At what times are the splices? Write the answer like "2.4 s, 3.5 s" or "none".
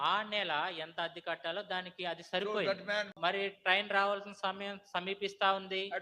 3.1 s